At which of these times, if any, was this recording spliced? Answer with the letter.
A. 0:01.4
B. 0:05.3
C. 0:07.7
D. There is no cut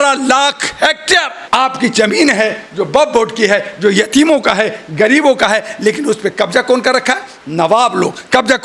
A